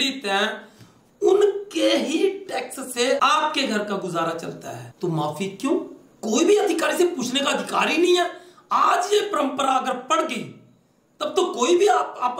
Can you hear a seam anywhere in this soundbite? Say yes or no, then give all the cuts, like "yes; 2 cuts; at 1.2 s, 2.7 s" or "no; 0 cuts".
no; 0 cuts